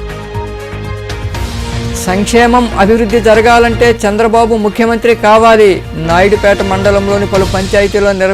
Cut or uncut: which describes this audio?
cut